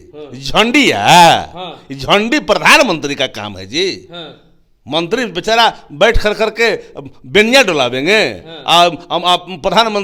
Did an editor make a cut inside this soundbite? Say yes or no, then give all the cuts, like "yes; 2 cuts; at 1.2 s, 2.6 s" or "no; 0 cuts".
no; 0 cuts